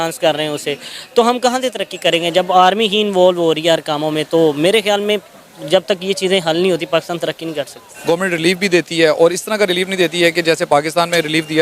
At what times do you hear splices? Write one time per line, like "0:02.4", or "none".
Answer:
0:07.8